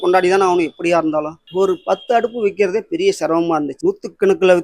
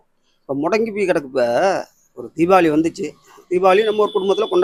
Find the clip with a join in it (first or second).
first